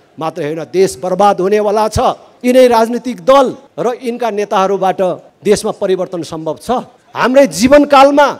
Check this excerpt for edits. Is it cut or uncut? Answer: cut